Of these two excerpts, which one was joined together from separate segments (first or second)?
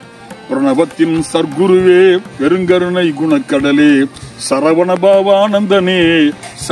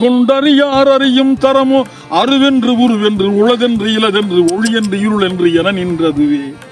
first